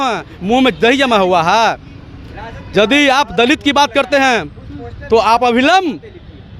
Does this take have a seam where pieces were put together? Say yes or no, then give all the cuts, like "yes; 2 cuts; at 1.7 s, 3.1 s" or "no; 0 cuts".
no; 0 cuts